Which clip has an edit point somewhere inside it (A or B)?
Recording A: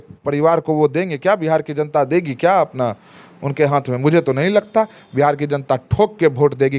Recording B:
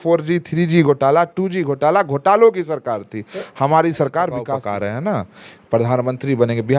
B